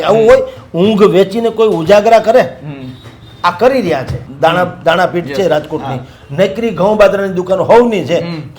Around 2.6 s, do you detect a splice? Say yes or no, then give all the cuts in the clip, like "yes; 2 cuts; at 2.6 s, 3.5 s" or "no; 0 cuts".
no; 1 cut; at 4.2 s